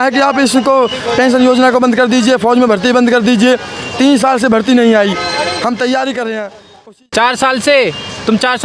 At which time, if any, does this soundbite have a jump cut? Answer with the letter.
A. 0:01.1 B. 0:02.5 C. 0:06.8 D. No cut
C